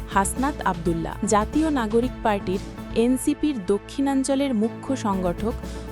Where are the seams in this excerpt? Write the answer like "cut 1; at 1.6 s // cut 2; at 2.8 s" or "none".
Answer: cut 1; at 1.1 s